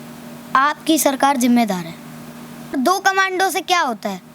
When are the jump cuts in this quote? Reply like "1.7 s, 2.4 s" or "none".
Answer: 2.8 s